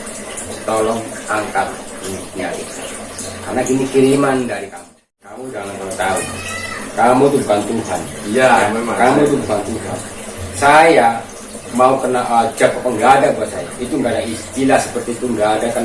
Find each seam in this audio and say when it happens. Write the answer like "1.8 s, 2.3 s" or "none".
4.6 s